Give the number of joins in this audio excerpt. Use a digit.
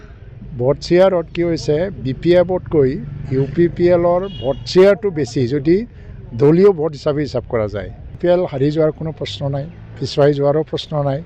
1